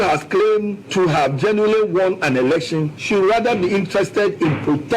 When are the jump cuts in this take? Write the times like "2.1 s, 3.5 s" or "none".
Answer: none